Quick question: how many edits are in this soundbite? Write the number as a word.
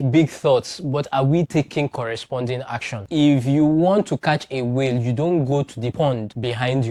zero